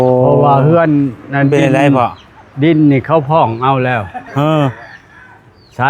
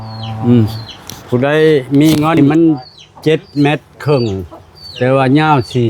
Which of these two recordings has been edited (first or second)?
second